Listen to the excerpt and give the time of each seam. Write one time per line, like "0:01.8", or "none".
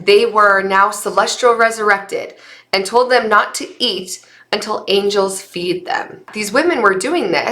0:06.3